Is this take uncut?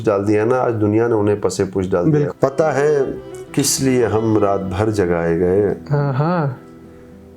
no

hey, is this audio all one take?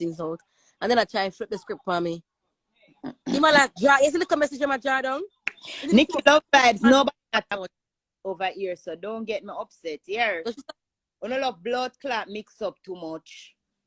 no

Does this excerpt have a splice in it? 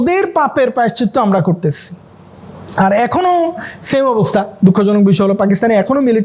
no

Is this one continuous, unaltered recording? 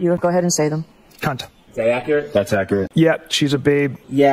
no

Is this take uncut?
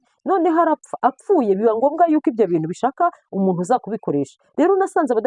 yes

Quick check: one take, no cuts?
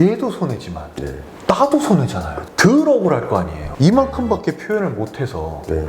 no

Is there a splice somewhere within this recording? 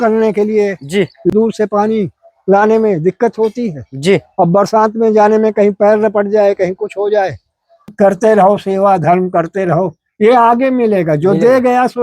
yes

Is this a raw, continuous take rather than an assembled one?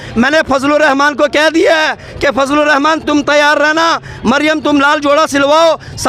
yes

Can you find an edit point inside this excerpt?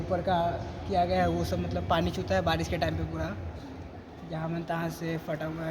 no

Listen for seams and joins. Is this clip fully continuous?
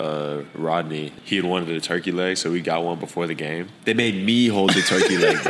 no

